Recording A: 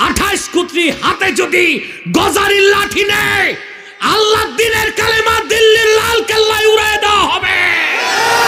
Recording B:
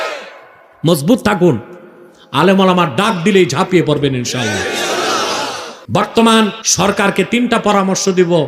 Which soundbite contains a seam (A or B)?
B